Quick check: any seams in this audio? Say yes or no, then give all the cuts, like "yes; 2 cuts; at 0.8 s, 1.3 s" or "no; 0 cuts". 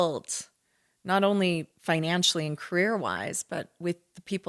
yes; 1 cut; at 1.7 s